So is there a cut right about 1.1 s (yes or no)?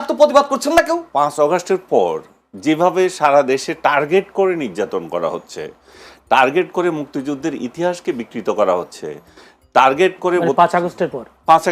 yes